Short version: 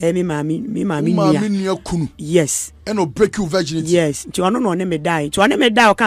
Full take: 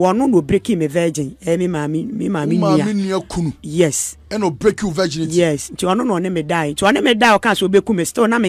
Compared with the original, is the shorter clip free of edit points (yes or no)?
yes